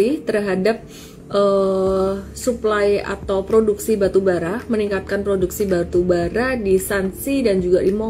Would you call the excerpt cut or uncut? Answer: uncut